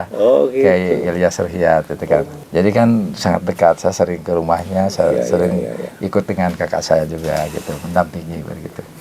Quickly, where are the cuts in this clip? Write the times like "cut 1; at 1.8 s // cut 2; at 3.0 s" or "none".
cut 1; at 2.4 s